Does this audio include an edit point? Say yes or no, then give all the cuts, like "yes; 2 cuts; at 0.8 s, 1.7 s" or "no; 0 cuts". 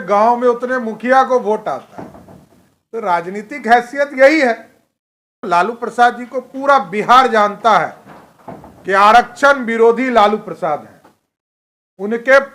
yes; 1 cut; at 5.4 s